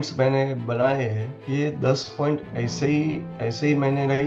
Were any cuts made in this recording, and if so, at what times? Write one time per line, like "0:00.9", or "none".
0:01.3